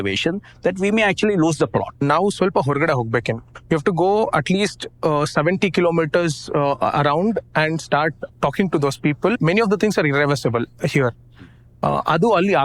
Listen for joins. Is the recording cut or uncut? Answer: cut